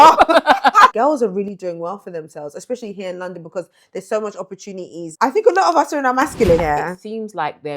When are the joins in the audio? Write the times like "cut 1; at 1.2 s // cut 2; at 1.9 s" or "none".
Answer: cut 1; at 0.9 s // cut 2; at 5.0 s // cut 3; at 6.6 s